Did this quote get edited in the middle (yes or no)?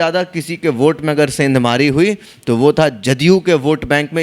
no